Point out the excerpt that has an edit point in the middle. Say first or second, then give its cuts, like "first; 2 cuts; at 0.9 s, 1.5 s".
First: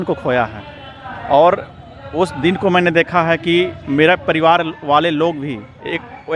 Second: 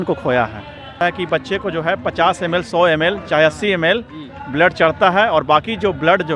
second; 1 cut; at 1.0 s